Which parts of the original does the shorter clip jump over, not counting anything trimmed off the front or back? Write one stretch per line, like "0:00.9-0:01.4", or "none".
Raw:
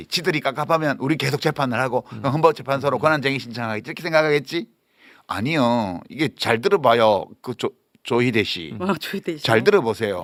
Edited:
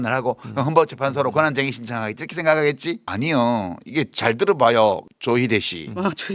0:04.7-0:05.3
0:07.3-0:07.9